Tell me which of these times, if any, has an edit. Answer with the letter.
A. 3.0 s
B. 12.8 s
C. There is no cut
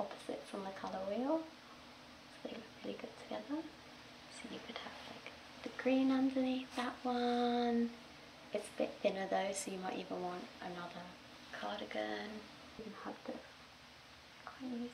B